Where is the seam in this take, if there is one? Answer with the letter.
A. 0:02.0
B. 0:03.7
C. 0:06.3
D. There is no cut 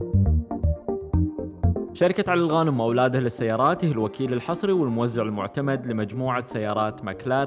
A